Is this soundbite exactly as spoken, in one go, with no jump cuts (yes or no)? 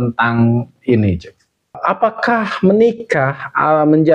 no